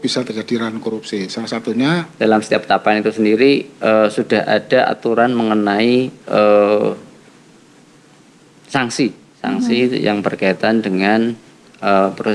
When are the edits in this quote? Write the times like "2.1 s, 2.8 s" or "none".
2.1 s